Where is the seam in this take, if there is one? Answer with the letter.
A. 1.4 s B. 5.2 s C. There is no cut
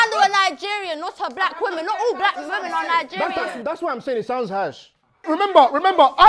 B